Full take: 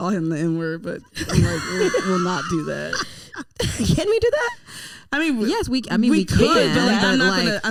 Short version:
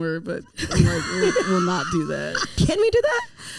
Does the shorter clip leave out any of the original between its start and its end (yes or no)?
yes